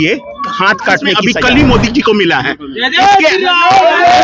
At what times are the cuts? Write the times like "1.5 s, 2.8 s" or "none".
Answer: 1.2 s